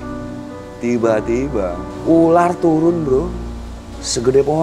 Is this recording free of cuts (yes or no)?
no